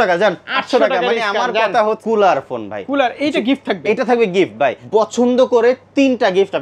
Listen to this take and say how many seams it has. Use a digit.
2